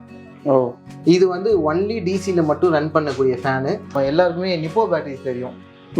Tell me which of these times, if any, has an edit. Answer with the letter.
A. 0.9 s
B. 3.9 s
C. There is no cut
B